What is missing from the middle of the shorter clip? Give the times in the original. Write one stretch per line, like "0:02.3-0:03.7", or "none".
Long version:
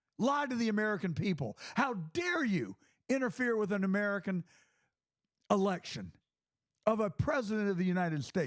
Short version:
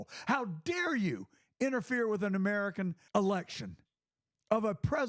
0:04.5-0:05.4

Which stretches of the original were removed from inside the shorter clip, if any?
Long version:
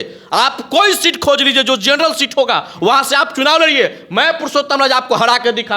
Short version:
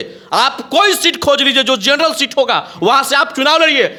none

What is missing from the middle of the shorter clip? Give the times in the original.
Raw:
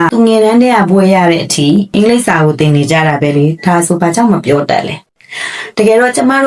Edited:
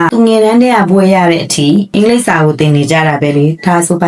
none

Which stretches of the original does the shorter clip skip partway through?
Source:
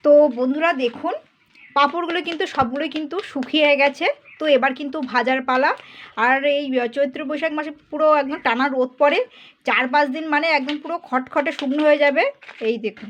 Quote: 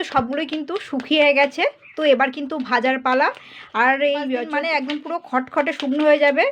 0:06.9-0:10.3

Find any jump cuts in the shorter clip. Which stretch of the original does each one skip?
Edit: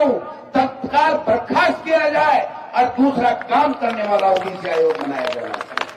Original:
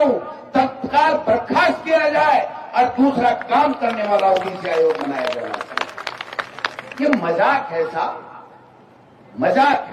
none

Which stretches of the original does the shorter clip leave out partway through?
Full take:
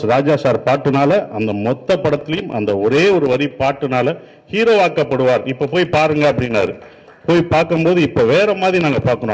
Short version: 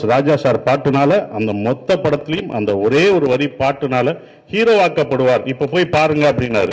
none

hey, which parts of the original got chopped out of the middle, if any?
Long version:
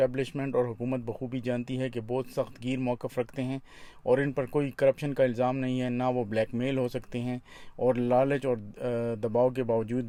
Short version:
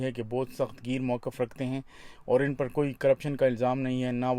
none

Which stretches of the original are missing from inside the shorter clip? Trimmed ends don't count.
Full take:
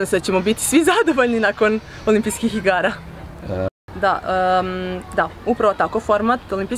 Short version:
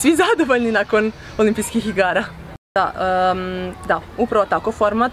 0:03.2-0:03.8

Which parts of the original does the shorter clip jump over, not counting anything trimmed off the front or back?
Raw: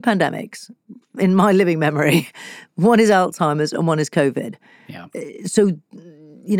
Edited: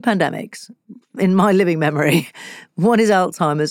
none

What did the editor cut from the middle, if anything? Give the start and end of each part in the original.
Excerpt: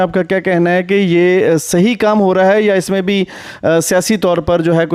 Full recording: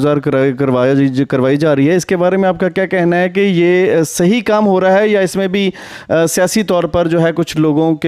none

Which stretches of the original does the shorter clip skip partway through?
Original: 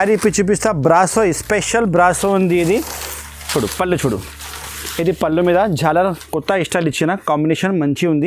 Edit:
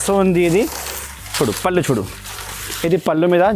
none

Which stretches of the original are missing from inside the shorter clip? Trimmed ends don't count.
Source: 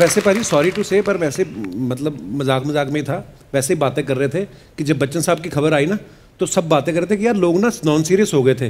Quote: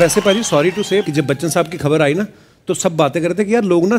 0:01.0-0:04.8

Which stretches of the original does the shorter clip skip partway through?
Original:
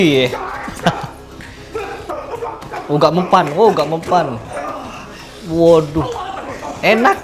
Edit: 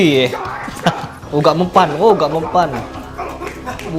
0:01.1-0:02.7

